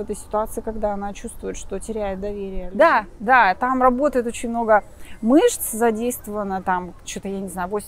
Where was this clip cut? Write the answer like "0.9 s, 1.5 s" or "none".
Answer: 2.6 s